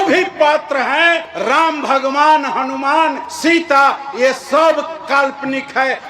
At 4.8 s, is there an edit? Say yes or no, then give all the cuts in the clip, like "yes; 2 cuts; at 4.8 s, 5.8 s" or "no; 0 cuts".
no; 2 cuts; at 1.3 s, 3.3 s